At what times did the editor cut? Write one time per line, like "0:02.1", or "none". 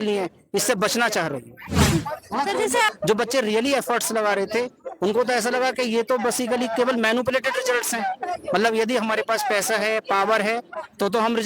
0:02.9